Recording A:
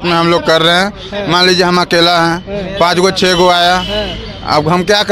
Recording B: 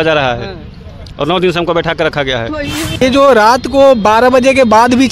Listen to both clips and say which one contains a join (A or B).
B